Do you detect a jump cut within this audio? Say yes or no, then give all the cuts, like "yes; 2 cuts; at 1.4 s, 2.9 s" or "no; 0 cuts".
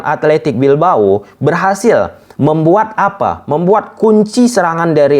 no; 0 cuts